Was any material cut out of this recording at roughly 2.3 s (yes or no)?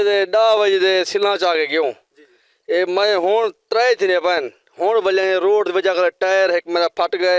no